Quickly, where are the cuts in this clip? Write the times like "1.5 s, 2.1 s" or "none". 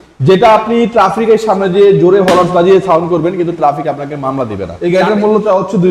4.8 s